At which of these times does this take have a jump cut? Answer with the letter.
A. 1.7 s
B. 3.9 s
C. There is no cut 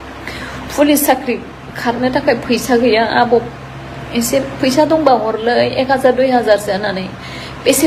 C